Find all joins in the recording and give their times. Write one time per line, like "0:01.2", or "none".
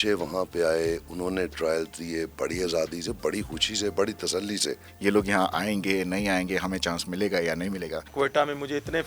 0:04.8
0:08.1